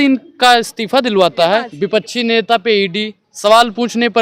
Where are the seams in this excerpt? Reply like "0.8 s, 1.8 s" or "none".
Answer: 1.7 s